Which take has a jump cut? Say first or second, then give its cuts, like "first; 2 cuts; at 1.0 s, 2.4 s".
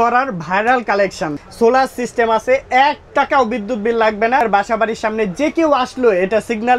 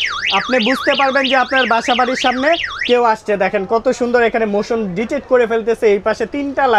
first; 2 cuts; at 1.3 s, 4.4 s